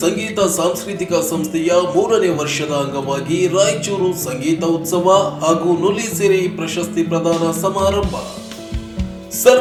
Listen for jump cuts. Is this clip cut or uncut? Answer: uncut